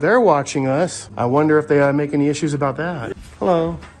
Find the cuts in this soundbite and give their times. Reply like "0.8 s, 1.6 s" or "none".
1.0 s, 3.1 s